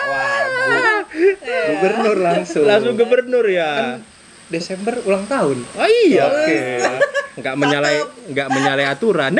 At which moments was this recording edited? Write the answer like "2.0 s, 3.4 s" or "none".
none